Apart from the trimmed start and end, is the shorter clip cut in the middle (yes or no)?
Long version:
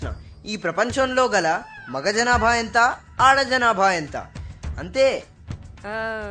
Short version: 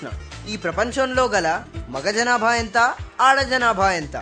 no